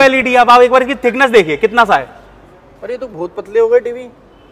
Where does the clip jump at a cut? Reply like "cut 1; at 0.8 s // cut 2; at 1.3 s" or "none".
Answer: none